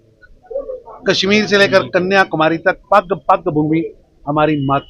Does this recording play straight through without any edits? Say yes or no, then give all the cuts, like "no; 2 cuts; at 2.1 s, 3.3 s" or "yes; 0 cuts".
yes; 0 cuts